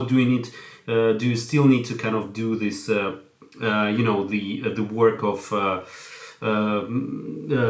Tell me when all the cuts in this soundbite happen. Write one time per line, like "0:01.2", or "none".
none